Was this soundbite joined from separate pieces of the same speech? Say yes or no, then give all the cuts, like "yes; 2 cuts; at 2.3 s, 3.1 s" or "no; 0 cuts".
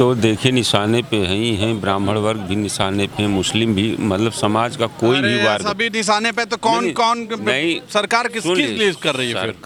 no; 0 cuts